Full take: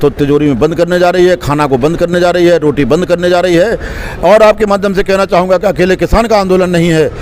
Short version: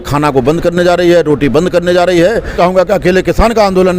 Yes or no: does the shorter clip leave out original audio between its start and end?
yes